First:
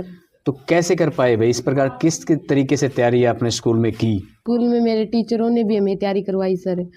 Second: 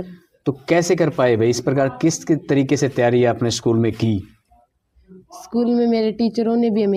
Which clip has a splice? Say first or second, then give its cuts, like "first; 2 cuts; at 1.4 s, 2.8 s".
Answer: first; 1 cut; at 4.3 s